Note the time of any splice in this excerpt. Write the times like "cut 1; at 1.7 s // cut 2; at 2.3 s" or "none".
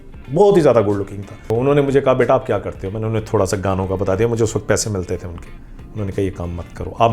cut 1; at 1.5 s